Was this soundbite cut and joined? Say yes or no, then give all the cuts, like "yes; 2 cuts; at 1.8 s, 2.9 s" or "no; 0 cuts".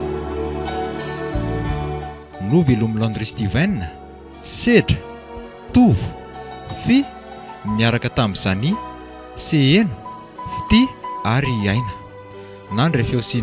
no; 0 cuts